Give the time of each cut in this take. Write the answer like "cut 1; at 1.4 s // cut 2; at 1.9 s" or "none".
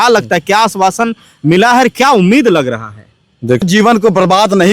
cut 1; at 3.6 s

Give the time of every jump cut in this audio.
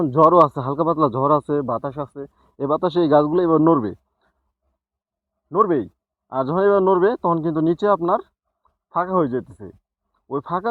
none

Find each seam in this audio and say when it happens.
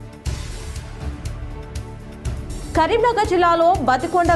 none

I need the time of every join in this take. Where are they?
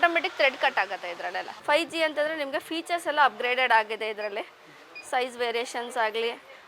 cut 1; at 1.5 s

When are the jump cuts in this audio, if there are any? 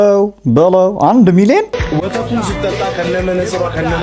cut 1; at 1.8 s

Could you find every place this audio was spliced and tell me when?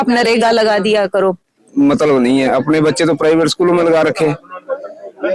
cut 1; at 1.6 s

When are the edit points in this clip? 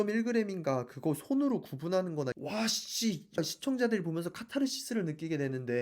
cut 1; at 2.4 s

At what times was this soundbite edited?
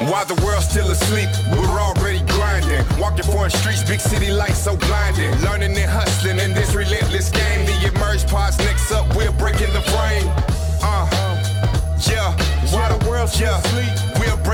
none

